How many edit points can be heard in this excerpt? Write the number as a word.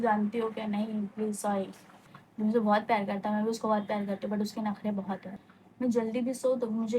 two